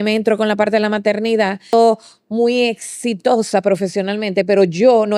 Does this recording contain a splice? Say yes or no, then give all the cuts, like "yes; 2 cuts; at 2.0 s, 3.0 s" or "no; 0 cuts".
yes; 1 cut; at 1.7 s